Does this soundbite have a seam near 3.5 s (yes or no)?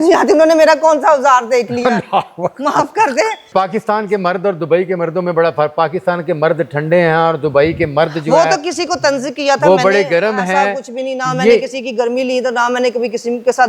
yes